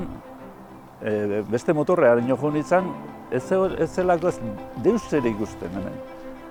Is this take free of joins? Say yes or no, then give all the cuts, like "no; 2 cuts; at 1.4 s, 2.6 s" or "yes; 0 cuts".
yes; 0 cuts